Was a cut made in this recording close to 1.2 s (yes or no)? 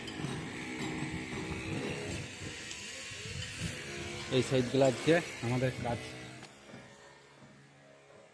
no